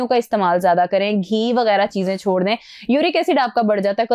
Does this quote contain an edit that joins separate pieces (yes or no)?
no